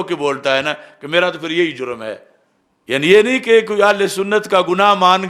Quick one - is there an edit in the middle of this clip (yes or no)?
no